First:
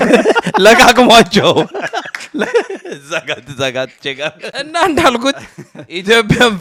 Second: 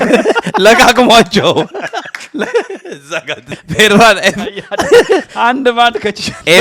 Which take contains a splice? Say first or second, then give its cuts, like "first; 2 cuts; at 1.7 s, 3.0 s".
second; 1 cut; at 3.5 s